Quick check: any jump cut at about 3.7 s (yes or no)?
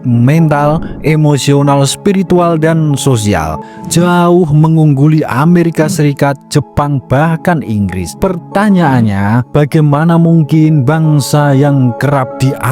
yes